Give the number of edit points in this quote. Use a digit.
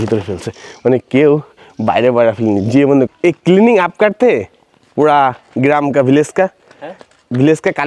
1